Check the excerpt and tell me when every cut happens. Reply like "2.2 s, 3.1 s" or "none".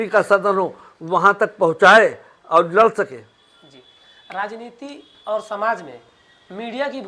none

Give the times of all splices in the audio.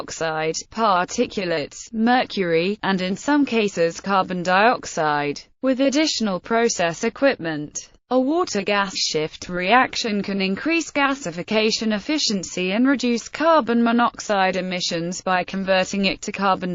none

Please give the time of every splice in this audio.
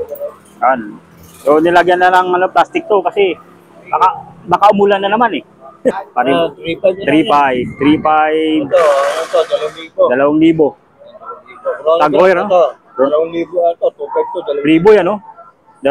5.9 s

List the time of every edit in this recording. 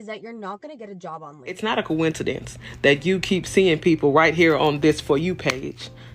1.5 s

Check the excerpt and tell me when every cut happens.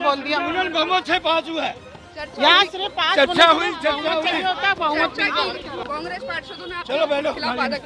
5.8 s

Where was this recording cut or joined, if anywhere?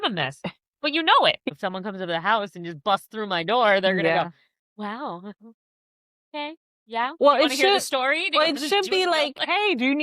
1.5 s

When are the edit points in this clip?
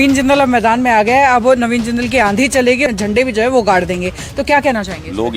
2.8 s

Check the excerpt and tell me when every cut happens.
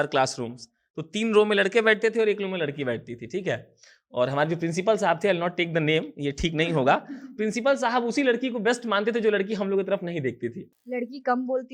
10.7 s

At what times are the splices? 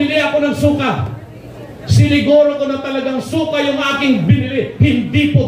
none

